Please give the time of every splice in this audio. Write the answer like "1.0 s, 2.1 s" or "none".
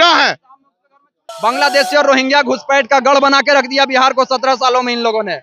1.2 s